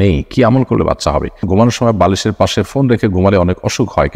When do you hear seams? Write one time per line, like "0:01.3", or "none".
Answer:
0:01.4